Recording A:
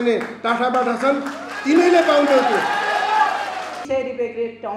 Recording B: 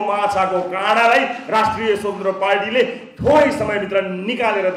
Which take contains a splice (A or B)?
A